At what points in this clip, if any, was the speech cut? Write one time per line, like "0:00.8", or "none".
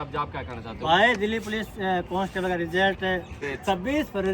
0:03.4